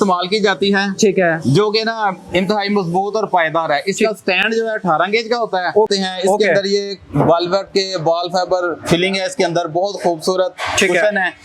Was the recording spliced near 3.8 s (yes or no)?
no